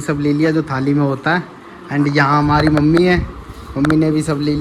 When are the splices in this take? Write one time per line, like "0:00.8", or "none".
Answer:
none